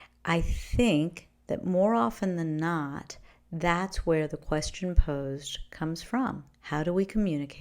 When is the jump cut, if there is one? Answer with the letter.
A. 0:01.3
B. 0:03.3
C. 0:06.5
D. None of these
C